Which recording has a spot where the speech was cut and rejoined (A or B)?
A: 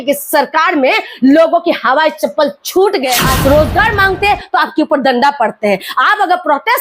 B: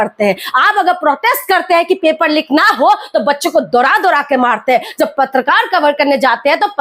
A